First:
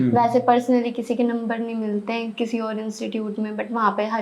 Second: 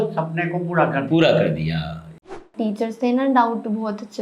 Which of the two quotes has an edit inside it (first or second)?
second